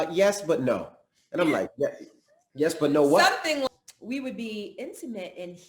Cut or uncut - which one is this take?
cut